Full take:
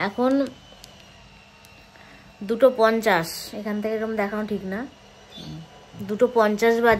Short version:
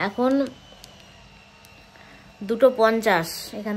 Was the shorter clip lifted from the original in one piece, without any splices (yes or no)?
yes